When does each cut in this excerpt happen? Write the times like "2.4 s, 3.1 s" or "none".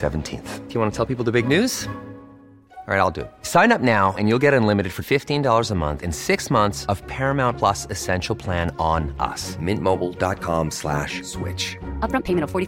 none